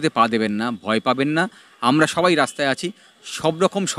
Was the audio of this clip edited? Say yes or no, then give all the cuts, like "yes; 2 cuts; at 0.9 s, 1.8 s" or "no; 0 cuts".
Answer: no; 0 cuts